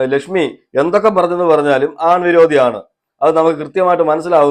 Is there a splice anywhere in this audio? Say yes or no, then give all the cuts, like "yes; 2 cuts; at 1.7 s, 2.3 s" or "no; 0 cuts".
no; 0 cuts